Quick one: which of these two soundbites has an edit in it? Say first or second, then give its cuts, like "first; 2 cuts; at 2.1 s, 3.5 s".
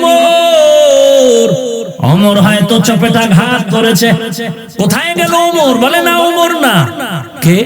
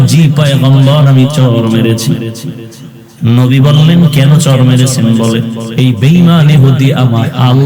first; 2 cuts; at 1.9 s, 4.6 s